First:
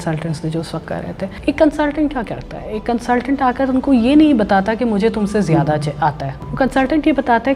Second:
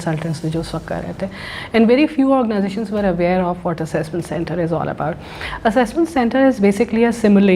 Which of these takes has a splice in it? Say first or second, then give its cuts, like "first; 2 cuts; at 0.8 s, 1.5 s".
first; 2 cuts; at 1.3 s, 6.4 s